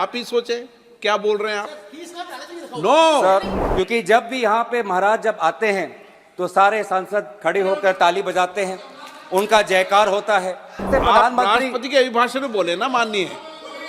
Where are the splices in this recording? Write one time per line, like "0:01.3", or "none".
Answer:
0:03.6
0:10.9